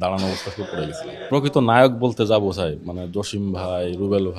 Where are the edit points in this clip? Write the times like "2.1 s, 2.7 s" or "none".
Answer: 1.1 s